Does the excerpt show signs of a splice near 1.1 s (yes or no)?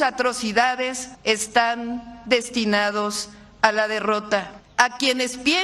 yes